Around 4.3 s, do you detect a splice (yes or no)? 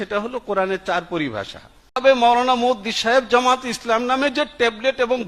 no